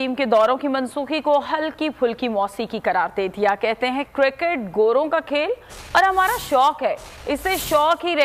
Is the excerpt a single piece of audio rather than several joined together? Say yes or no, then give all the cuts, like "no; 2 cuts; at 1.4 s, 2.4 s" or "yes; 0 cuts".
no; 1 cut; at 4.1 s